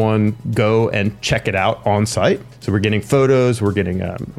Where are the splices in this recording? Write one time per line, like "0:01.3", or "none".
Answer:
0:02.5